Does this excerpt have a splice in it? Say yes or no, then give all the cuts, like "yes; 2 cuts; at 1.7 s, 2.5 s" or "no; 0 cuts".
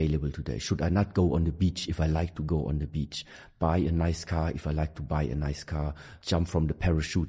yes; 1 cut; at 6.2 s